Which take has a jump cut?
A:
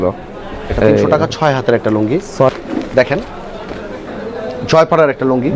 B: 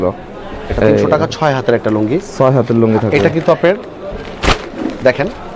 A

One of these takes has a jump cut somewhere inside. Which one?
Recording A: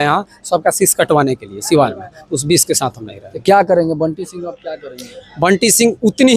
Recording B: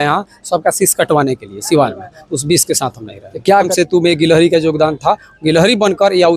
B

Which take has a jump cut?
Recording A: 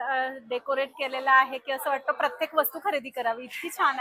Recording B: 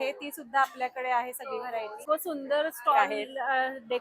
B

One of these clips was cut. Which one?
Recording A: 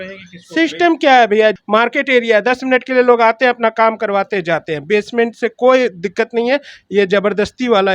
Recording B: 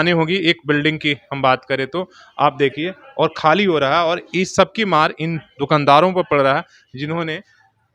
A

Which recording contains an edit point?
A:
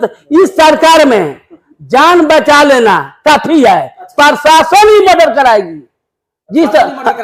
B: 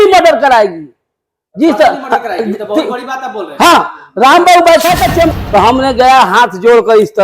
B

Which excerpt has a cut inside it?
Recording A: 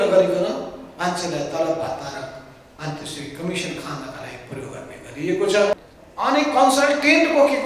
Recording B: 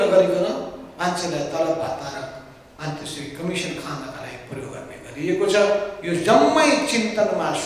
A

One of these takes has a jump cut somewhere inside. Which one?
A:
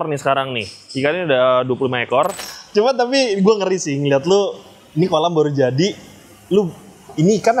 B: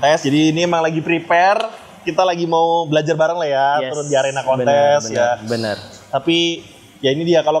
A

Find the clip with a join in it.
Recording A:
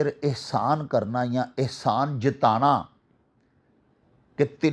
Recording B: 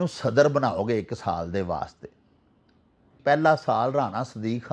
B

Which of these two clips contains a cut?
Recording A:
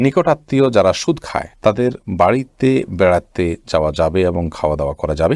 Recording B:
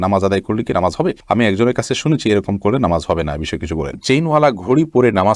B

